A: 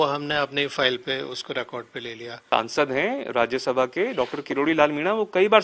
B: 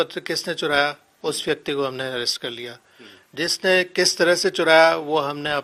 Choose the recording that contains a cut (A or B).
A